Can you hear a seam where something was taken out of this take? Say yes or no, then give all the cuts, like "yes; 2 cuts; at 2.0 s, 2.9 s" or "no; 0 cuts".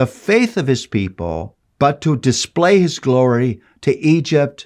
yes; 1 cut; at 1.6 s